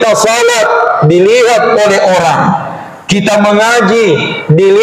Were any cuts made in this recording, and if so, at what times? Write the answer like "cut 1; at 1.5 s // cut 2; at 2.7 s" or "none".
none